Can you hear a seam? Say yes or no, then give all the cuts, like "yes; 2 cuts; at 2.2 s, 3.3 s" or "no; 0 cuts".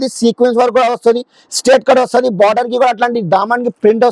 no; 0 cuts